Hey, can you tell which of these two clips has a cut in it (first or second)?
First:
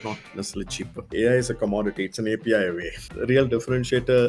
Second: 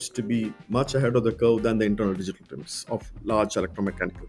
first